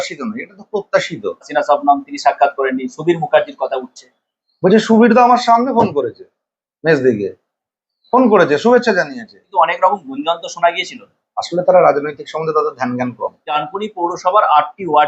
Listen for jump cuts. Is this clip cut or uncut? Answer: cut